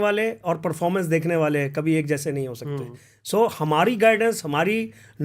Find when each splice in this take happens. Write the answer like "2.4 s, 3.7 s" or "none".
none